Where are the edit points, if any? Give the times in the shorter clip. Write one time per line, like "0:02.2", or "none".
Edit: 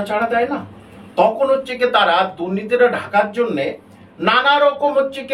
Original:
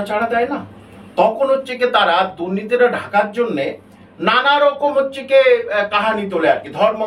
none